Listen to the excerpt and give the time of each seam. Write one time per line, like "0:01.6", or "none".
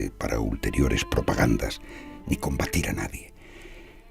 0:01.5